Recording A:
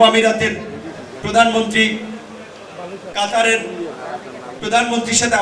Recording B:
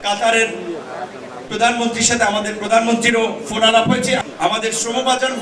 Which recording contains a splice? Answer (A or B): B